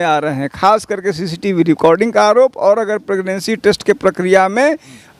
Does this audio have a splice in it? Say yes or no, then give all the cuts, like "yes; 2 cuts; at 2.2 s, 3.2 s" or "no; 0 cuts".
no; 0 cuts